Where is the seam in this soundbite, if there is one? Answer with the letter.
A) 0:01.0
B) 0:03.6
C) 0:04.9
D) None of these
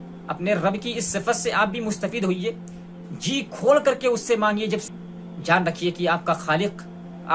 C